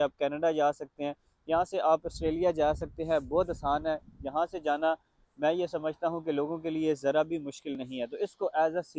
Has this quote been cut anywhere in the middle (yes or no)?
no